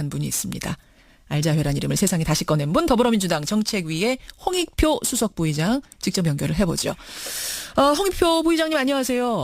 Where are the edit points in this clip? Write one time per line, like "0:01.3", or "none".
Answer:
0:06.6